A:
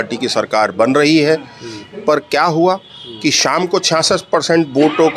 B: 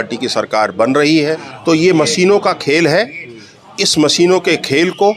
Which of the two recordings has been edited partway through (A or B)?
B